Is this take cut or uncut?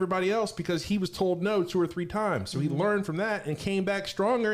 uncut